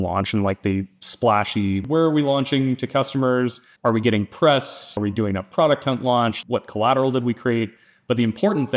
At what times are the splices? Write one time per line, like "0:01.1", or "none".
0:01.8
0:03.7
0:05.0
0:06.4